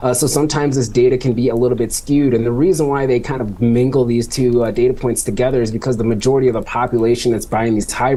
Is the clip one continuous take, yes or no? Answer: yes